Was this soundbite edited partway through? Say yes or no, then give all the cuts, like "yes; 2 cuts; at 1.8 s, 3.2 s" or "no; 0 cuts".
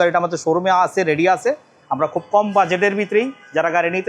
no; 0 cuts